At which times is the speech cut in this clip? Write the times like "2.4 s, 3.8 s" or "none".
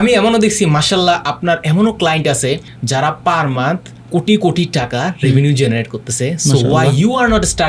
none